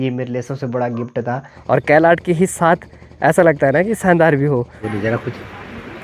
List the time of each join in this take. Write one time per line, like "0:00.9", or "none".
0:01.5
0:04.8